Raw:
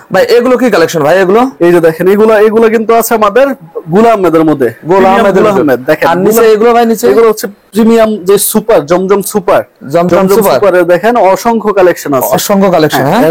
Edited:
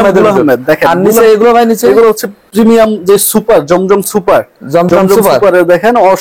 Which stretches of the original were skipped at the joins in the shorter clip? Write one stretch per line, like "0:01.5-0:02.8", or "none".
none